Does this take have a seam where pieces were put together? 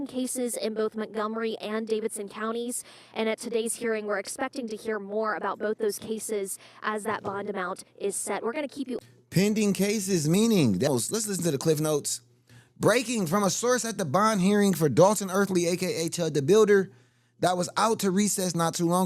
yes; 1 cut; at 10.9 s

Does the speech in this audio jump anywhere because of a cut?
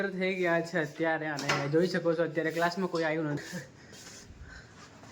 yes; 1 cut; at 3.4 s

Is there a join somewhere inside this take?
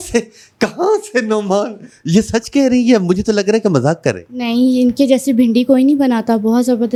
no; 0 cuts

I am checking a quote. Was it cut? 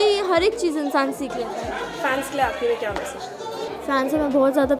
no; 0 cuts

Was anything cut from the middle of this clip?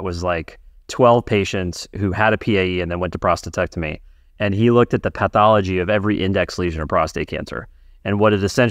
no; 0 cuts

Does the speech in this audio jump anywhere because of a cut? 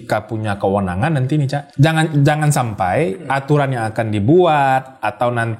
yes; 1 cut; at 1.6 s

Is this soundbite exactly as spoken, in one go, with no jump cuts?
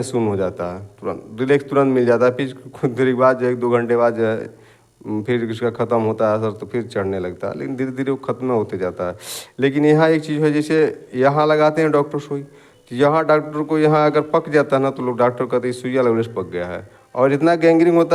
yes; 0 cuts

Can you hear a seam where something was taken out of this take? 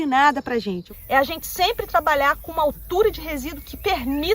yes; 1 cut; at 0.9 s

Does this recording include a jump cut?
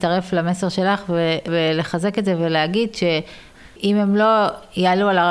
yes; 2 cuts; at 1.5 s, 3.5 s

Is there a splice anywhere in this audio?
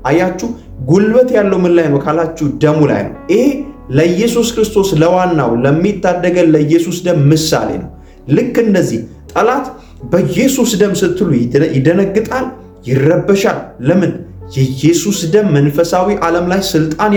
no; 0 cuts

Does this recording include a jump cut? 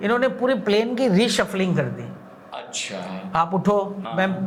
no; 0 cuts

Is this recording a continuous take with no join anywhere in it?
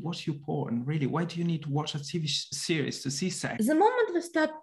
no; 1 cut; at 3.5 s

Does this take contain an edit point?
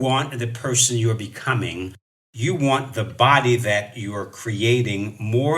yes; 1 cut; at 2.1 s

